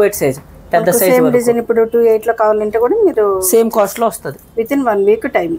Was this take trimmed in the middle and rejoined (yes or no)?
no